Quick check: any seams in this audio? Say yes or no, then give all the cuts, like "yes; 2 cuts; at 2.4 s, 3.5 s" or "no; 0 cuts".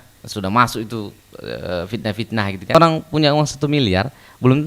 yes; 1 cut; at 2.7 s